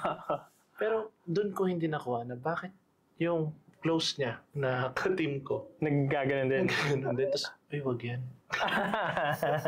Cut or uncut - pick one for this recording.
cut